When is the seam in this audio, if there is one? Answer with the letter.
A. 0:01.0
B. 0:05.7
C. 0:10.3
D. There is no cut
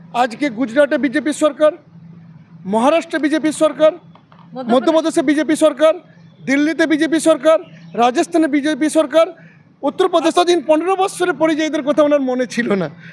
C